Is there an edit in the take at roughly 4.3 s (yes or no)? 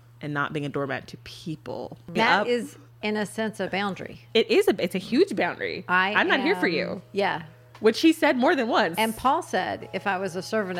no